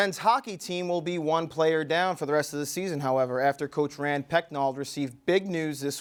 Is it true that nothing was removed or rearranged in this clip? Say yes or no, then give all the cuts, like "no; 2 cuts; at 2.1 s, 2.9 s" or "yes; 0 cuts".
yes; 0 cuts